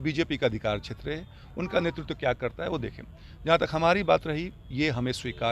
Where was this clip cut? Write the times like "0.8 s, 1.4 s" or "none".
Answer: none